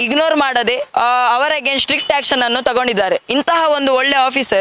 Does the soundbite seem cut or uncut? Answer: uncut